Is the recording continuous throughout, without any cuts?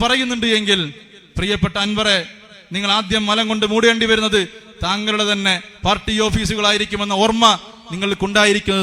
yes; 0 cuts

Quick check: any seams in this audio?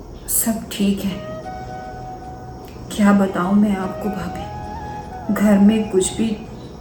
no; 0 cuts

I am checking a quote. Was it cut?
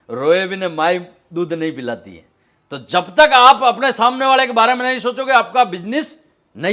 no; 0 cuts

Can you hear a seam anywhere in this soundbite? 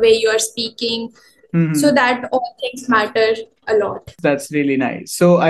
no; 0 cuts

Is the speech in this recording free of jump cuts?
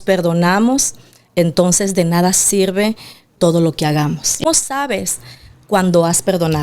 no; 1 cut; at 4.4 s

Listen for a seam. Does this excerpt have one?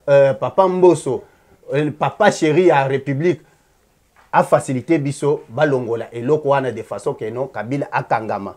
no; 0 cuts

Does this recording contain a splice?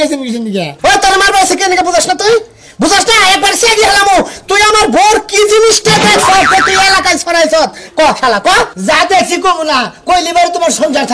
no; 0 cuts

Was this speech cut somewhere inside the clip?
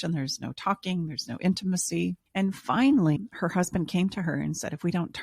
yes; 1 cut; at 2.2 s

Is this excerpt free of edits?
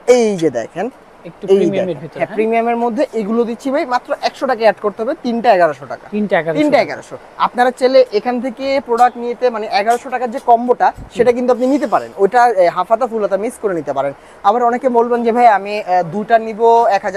yes; 0 cuts

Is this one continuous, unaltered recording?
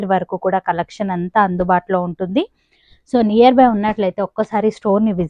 yes; 0 cuts

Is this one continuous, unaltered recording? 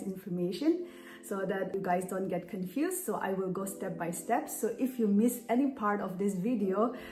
yes; 0 cuts

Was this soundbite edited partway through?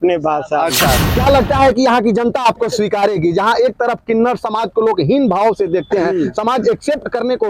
yes; 1 cut; at 1.0 s

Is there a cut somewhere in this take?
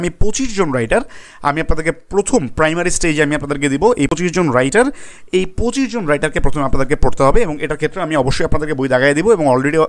no; 0 cuts

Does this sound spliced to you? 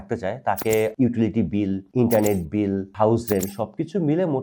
yes; 3 cuts; at 0.9 s, 1.8 s, 2.9 s

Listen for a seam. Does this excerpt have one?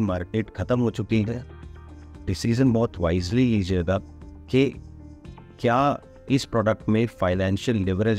no; 0 cuts

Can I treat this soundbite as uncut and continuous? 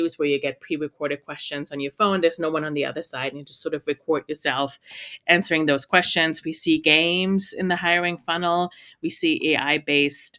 yes; 0 cuts

